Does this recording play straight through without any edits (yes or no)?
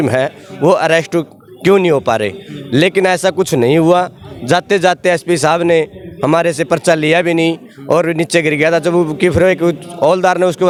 yes